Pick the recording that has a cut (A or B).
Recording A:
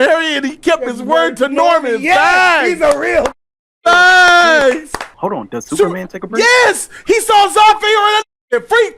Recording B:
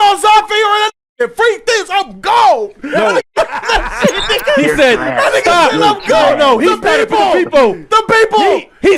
A